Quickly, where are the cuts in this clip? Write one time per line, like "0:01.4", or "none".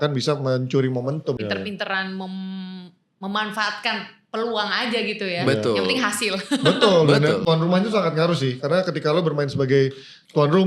0:01.4
0:07.4